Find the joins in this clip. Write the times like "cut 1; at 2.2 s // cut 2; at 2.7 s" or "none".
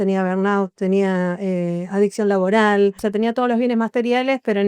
cut 1; at 3.0 s